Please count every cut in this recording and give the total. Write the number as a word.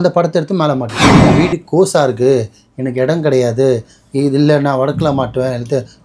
one